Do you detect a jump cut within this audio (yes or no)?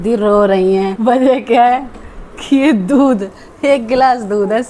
no